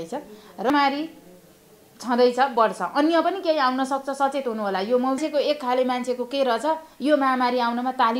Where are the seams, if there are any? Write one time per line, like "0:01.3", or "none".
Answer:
0:00.7
0:05.2